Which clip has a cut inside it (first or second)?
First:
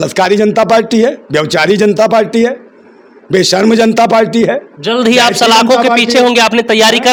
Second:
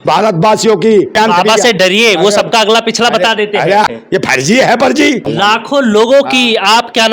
second